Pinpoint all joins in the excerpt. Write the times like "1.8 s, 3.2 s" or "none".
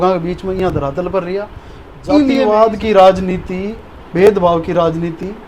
2.4 s